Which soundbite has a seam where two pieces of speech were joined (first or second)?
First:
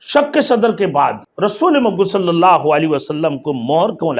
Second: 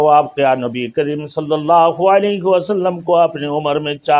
first